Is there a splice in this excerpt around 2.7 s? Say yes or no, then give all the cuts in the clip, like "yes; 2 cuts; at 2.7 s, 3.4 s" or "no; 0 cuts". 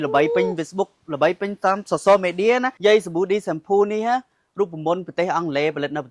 yes; 1 cut; at 2.7 s